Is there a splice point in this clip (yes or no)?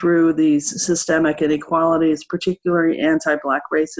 no